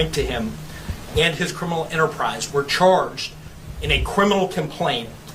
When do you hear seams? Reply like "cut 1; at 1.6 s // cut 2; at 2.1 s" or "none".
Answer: none